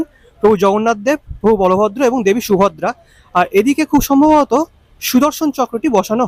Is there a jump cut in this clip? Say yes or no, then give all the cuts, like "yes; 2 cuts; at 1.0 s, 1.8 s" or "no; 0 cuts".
no; 0 cuts